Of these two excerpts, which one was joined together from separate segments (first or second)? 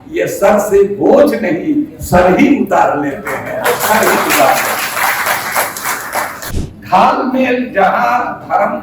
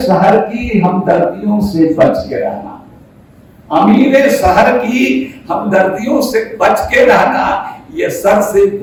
first